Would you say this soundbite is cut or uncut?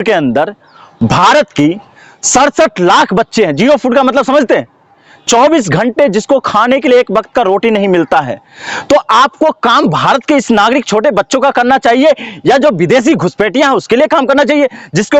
uncut